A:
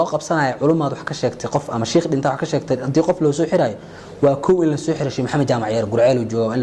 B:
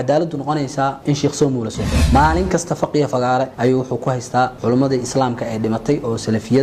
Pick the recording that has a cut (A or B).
B